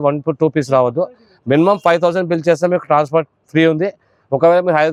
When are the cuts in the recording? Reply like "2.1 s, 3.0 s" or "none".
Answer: none